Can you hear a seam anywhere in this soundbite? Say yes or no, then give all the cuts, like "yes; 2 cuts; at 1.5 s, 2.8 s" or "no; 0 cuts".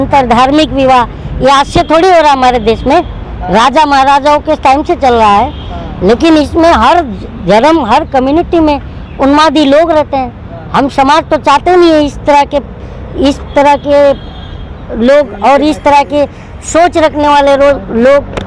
no; 0 cuts